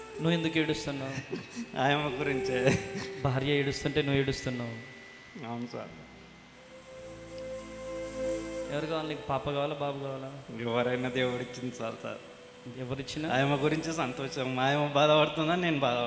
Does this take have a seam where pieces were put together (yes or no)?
no